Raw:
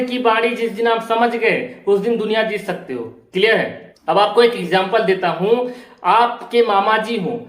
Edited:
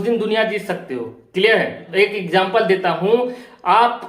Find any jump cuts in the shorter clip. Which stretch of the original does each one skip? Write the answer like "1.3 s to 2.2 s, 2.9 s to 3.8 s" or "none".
4.1 s to 4.5 s